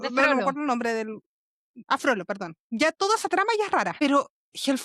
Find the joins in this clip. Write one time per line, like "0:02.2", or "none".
0:01.8
0:03.9